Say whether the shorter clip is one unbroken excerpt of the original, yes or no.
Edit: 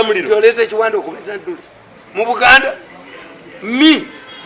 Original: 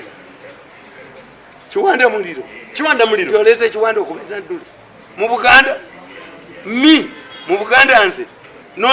yes